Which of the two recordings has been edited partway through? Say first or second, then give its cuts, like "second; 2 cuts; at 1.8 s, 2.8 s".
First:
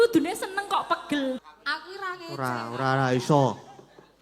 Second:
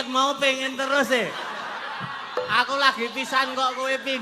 first; 1 cut; at 1.4 s